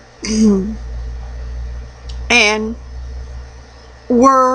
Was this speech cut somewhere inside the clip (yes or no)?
yes